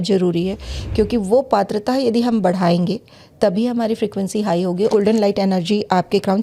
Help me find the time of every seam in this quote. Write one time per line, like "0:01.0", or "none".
0:04.9

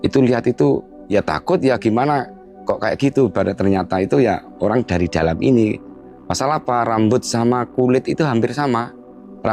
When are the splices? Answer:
0:00.9

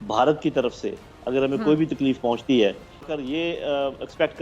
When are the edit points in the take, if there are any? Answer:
0:03.1

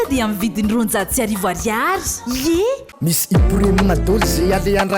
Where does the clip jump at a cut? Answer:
0:02.9

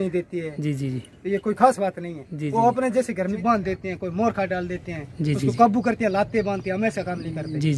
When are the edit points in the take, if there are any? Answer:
0:03.4

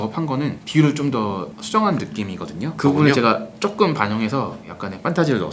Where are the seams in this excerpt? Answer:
0:02.8

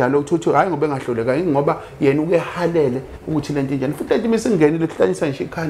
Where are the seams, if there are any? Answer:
none

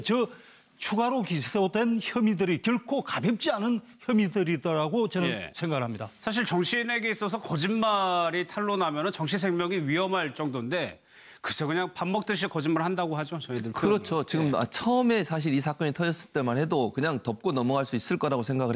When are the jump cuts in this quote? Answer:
0:04.5

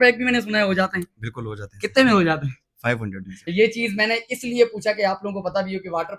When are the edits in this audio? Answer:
none

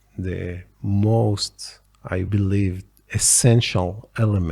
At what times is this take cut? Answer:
0:02.3

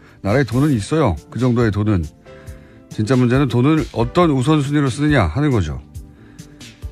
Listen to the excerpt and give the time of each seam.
none

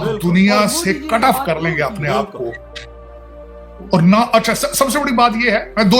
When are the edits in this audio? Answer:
none

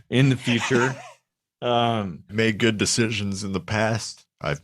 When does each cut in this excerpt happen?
0:02.3

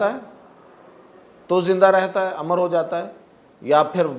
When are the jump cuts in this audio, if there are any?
none

